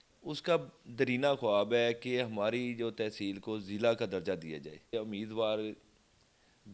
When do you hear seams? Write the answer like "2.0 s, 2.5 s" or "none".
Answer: 4.9 s